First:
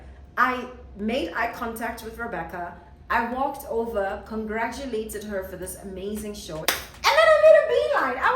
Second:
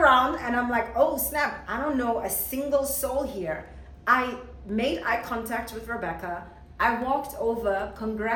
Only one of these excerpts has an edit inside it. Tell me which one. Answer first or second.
first